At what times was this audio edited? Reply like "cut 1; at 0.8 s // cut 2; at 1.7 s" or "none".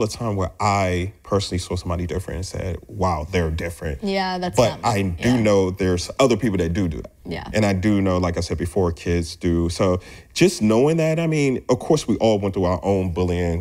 cut 1; at 6.1 s